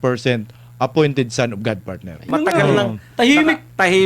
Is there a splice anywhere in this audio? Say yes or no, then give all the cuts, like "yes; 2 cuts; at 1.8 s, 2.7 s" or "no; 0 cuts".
yes; 1 cut; at 2.2 s